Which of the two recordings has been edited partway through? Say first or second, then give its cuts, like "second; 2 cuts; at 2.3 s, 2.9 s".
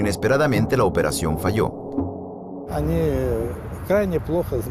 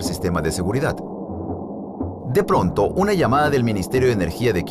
second; 1 cut; at 2.5 s